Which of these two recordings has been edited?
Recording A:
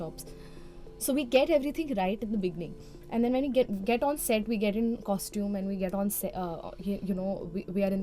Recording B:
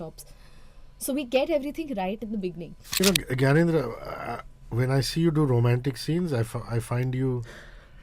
B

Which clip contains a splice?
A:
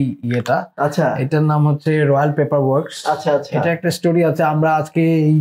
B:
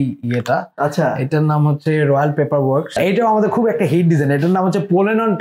B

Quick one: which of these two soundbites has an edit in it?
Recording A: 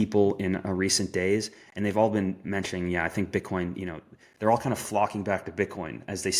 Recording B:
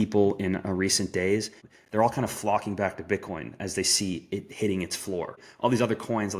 B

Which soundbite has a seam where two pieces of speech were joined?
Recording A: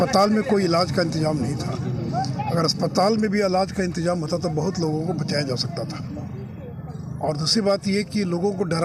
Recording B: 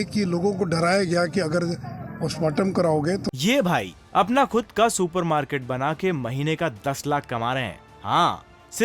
B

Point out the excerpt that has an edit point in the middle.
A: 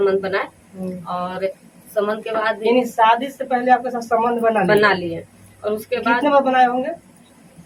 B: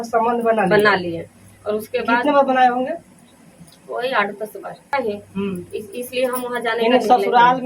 B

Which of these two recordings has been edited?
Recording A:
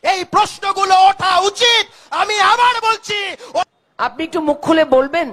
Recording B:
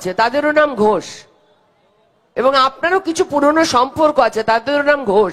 A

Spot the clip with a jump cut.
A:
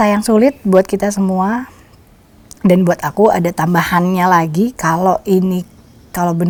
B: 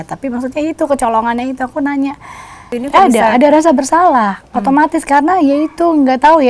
B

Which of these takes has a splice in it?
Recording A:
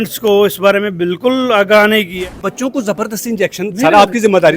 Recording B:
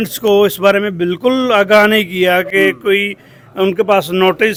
A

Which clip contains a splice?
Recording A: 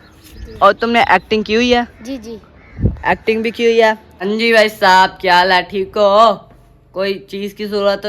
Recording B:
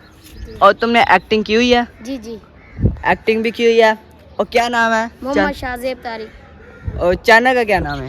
A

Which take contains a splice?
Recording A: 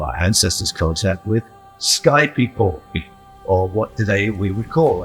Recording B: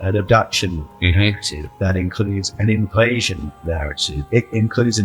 B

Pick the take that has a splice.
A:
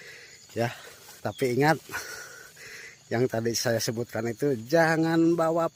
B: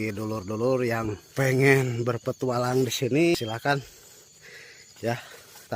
B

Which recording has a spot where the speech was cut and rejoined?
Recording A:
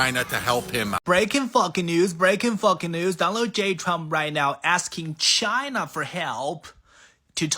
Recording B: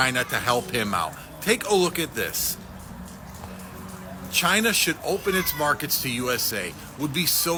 A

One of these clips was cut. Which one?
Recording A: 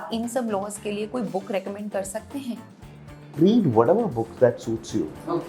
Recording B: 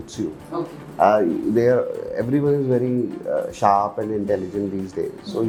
A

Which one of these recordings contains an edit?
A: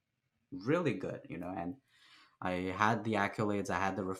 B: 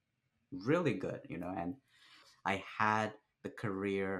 B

